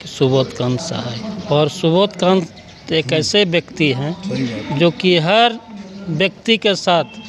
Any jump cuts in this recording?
yes; 1 cut; at 1.4 s

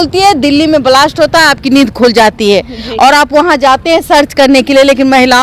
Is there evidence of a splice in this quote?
no; 0 cuts

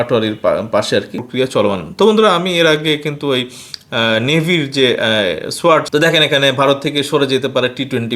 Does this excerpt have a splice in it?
yes; 2 cuts; at 1.2 s, 5.9 s

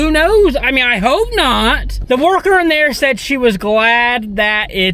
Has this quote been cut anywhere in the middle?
yes; 1 cut; at 1.9 s

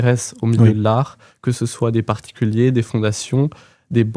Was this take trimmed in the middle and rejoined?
no; 0 cuts

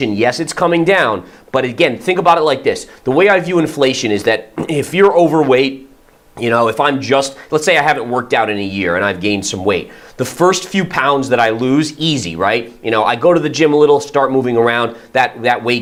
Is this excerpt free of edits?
yes; 0 cuts

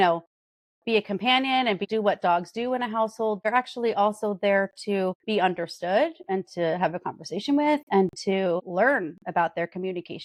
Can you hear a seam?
no; 0 cuts

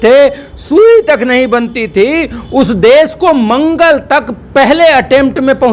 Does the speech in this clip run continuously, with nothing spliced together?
yes; 0 cuts

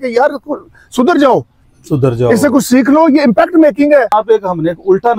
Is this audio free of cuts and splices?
no; 1 cut; at 4.1 s

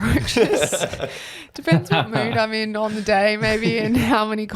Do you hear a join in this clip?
no; 0 cuts

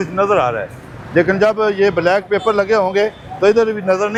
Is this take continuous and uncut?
yes; 0 cuts

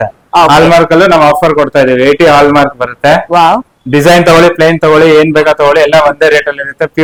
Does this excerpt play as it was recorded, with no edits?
yes; 0 cuts

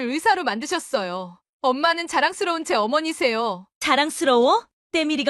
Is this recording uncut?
yes; 0 cuts

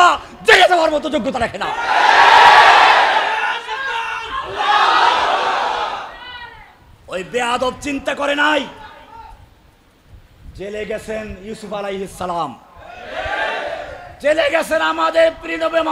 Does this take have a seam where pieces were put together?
no; 0 cuts

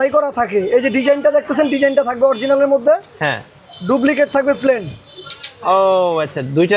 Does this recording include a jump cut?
no; 0 cuts

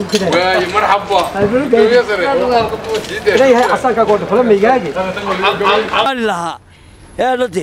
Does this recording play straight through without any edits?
no; 1 cut; at 6.1 s

